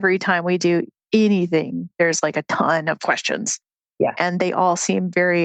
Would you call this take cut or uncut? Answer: uncut